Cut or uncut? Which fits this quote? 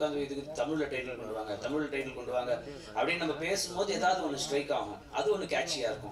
uncut